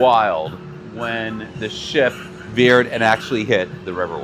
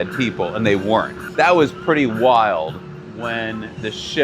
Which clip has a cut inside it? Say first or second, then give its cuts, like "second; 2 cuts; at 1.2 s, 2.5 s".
second; 1 cut; at 1.2 s